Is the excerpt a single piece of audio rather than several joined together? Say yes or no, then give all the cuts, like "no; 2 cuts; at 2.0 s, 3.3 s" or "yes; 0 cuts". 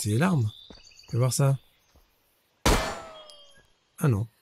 yes; 0 cuts